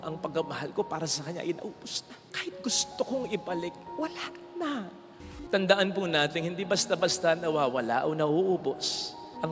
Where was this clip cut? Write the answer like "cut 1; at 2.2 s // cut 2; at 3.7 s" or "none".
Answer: cut 1; at 5.2 s